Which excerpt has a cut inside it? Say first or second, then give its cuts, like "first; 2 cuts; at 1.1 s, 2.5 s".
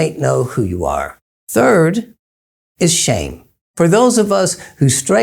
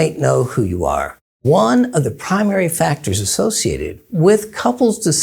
second; 1 cut; at 1.3 s